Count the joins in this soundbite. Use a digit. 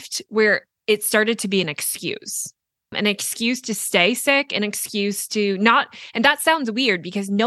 1